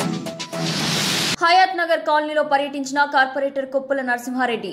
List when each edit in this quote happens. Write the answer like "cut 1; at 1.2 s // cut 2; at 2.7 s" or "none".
cut 1; at 1.3 s